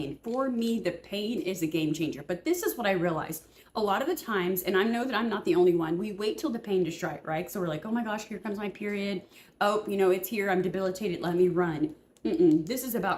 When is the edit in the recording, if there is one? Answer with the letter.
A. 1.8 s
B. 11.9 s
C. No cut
C